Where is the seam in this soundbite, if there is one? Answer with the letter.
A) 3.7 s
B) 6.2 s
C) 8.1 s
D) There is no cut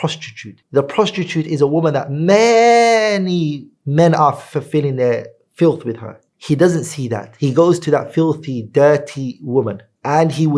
B